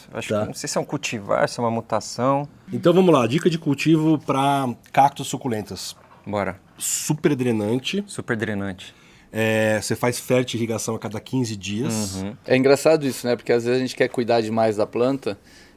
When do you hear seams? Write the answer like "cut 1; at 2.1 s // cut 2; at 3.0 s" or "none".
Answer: cut 1; at 2.6 s // cut 2; at 12.4 s